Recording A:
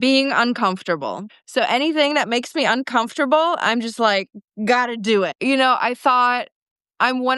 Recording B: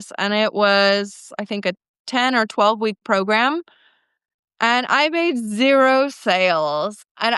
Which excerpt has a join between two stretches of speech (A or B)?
A